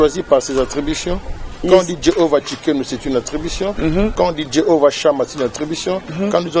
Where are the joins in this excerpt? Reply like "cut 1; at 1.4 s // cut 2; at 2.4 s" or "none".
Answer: none